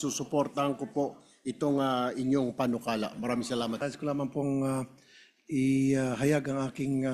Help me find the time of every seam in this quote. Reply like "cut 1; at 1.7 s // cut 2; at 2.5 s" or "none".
cut 1; at 3.8 s